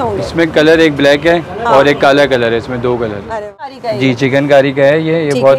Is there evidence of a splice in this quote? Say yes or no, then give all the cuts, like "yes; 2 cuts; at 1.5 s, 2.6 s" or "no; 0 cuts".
yes; 1 cut; at 3.7 s